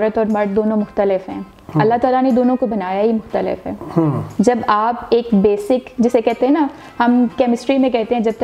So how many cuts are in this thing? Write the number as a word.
zero